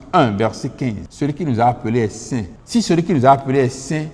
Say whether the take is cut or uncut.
cut